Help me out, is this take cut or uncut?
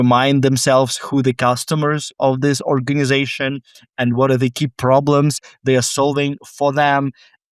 uncut